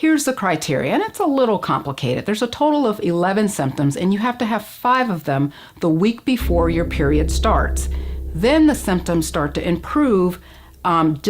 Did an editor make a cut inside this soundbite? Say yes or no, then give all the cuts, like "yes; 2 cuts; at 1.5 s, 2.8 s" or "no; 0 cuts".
yes; 1 cut; at 1.0 s